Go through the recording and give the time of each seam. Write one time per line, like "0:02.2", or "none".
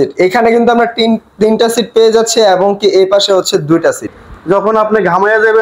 0:04.1